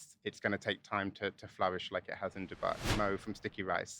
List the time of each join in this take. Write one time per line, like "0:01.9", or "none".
0:02.9